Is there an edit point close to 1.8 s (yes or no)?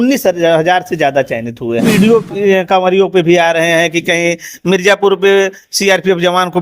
yes